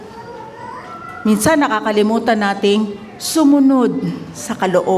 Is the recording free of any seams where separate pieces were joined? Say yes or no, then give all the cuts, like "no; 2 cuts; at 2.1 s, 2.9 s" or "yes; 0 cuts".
yes; 0 cuts